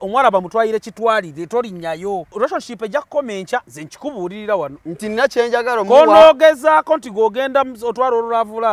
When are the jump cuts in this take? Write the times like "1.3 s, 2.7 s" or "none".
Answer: 2.3 s, 3.8 s, 4.8 s